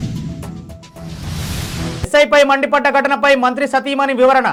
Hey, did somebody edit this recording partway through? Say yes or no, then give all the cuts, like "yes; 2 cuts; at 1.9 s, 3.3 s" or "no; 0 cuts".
no; 0 cuts